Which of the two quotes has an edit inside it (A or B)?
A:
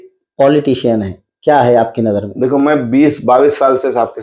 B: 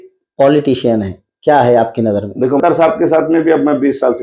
B